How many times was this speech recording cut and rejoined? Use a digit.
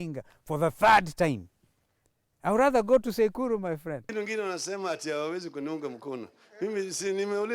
1